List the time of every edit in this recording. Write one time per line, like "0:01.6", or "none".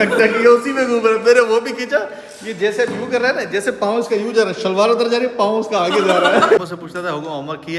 0:06.6

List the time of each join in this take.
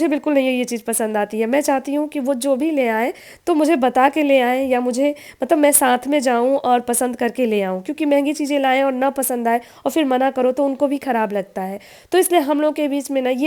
none

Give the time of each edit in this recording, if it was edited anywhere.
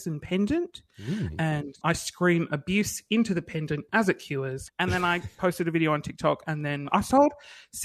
0:01.8
0:04.6
0:06.9

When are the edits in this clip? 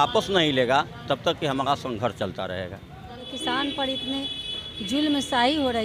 0:03.3

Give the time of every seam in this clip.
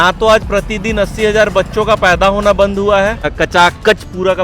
0:03.3

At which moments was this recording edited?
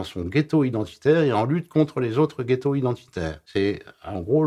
0:03.4

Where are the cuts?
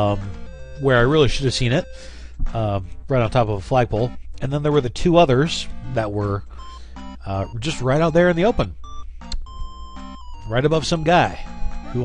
0:08.8

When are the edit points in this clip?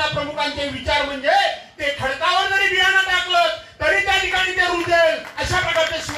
none

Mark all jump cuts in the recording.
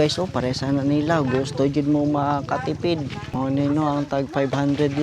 0:03.2

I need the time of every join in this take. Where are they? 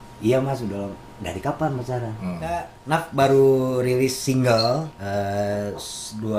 0:02.7
0:05.0

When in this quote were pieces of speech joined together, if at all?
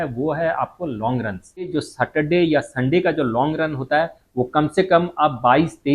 0:01.8

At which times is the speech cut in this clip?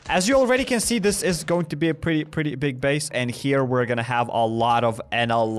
0:03.1

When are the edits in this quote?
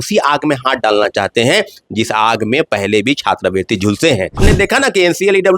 0:04.4

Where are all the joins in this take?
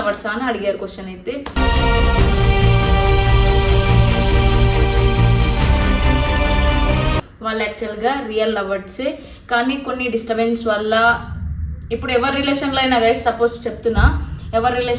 none

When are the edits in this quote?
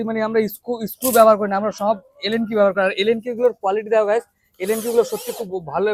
none

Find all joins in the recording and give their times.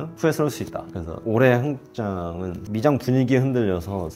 0:00.9
0:02.5

